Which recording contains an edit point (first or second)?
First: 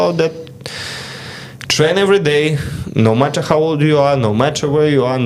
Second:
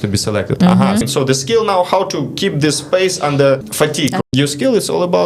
second